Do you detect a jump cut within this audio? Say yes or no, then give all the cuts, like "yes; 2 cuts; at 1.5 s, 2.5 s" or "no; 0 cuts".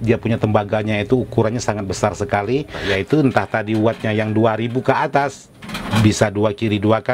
yes; 1 cut; at 2.8 s